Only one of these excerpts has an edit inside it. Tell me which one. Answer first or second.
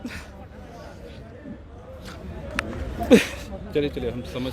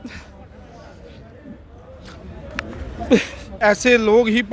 second